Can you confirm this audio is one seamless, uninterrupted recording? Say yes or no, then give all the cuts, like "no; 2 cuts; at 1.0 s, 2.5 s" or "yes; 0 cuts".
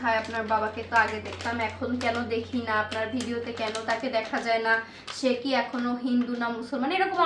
yes; 0 cuts